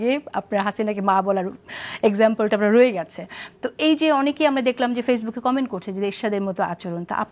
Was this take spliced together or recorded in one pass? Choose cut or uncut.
uncut